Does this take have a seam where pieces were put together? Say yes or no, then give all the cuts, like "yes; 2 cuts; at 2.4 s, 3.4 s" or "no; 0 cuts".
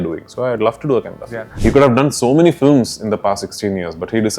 yes; 1 cut; at 1.4 s